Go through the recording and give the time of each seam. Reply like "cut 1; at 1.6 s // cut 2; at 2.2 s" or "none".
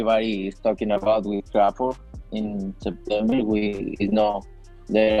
none